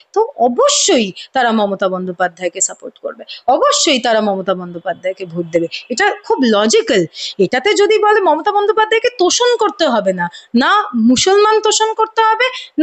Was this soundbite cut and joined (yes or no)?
no